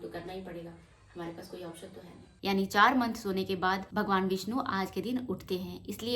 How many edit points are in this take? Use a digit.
1